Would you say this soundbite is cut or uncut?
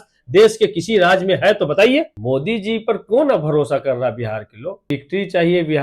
cut